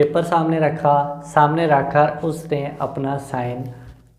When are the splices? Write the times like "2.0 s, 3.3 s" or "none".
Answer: none